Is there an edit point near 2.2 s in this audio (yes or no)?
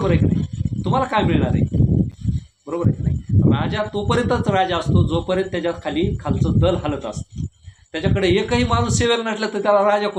no